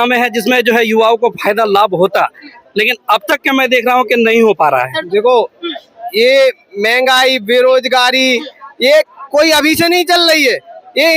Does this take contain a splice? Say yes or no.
yes